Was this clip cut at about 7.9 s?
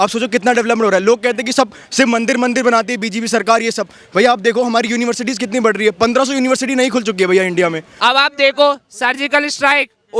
yes; 1 cut; at 7.9 s

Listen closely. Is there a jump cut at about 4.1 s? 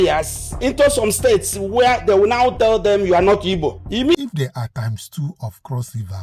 yes; 1 cut; at 4.1 s

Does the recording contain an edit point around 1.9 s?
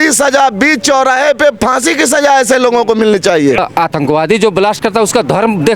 no; 1 cut; at 3.6 s

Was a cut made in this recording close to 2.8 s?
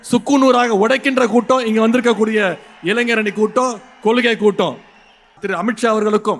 no; 1 cut; at 5.4 s

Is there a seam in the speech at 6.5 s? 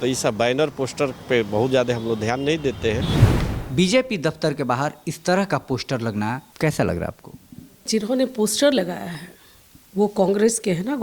yes; 3 cuts; at 3.2 s, 6.5 s, 7.9 s

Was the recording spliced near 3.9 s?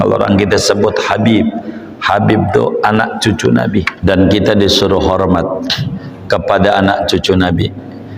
yes; 1 cut; at 3.9 s

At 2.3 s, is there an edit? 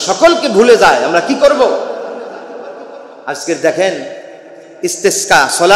no; 0 cuts

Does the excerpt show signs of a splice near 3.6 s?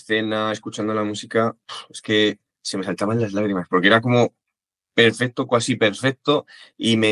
no; 0 cuts

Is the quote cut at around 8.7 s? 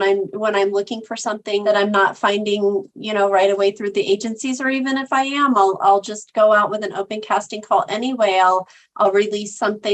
no; 1 cut; at 1.6 s

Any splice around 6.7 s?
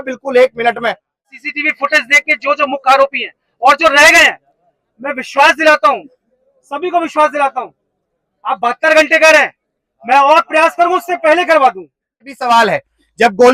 no; 2 cuts; at 1.3 s, 12.3 s

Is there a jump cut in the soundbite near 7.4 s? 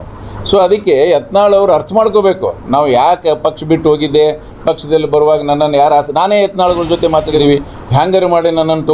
yes; 1 cut; at 7.4 s

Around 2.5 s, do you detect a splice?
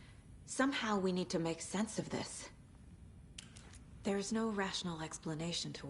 yes; 2 cuts; at 2.5 s, 4.0 s

